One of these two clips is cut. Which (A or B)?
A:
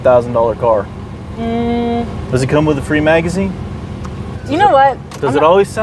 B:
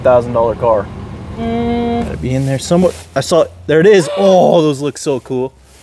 B